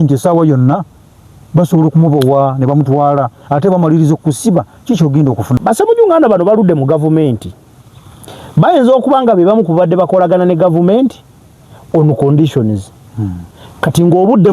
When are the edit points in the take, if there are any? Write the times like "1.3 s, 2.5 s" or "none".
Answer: 5.6 s